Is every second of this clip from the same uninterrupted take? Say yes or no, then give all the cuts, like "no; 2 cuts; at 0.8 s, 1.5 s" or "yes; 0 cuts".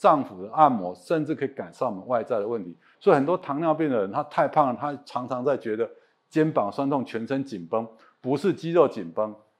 yes; 0 cuts